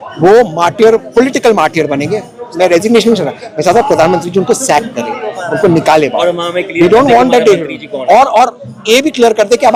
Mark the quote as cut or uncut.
uncut